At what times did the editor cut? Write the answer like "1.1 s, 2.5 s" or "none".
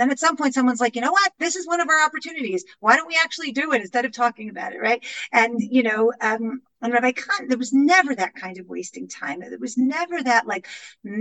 none